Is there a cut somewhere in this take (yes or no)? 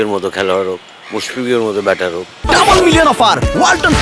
no